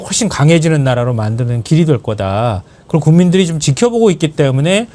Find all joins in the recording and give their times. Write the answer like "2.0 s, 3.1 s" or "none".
none